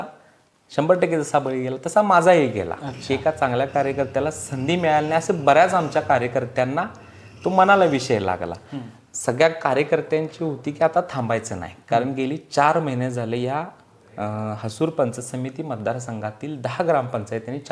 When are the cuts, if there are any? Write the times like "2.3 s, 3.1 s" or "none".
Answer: none